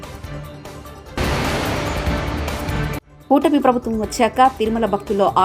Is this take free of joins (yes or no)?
no